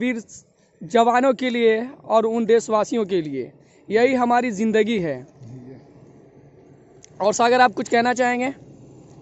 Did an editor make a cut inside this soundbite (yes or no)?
no